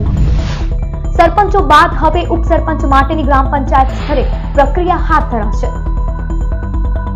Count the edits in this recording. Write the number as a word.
zero